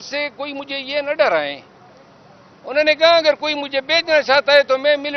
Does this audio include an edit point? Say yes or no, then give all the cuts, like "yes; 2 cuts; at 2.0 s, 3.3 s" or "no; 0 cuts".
no; 0 cuts